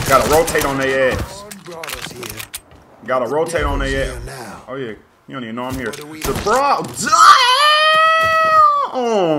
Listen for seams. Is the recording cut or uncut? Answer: uncut